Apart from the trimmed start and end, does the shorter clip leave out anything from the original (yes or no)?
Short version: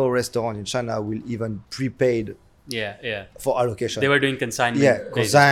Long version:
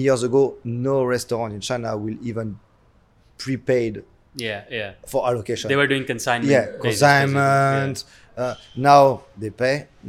yes